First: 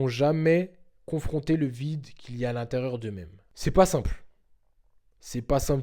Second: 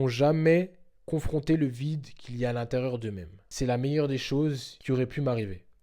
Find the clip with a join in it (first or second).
second